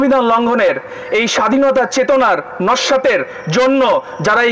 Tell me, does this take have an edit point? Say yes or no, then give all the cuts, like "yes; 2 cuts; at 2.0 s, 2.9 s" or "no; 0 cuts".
no; 0 cuts